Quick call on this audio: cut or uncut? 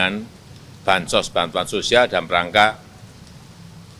uncut